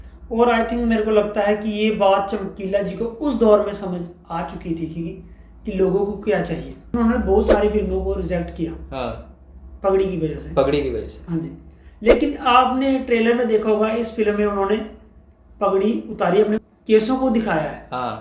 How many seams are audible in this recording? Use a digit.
2